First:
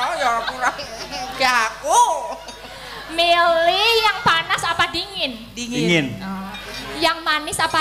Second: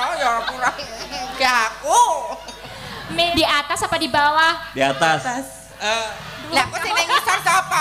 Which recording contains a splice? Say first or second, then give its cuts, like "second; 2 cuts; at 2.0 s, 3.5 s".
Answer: second; 1 cut; at 3.3 s